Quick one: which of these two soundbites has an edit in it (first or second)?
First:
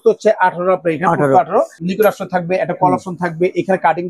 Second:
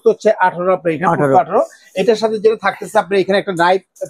first